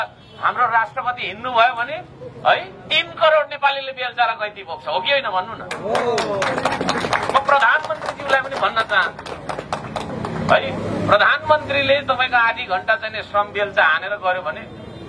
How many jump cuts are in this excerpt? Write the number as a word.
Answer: zero